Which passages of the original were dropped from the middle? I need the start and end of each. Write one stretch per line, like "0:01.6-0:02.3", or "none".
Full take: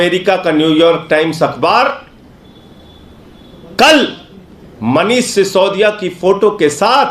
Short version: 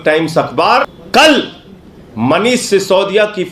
0:02.0-0:03.6